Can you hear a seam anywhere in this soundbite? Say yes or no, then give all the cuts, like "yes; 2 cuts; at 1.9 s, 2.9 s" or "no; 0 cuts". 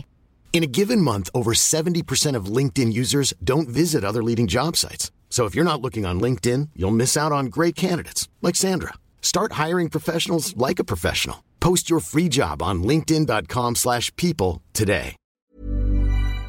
yes; 1 cut; at 15.5 s